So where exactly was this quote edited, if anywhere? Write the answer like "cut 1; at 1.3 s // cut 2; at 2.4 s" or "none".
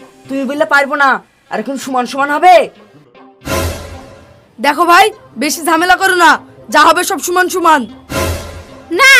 none